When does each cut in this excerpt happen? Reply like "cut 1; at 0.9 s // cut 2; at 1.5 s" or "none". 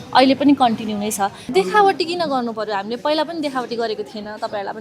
cut 1; at 1.4 s